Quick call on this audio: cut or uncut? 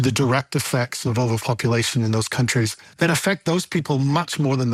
uncut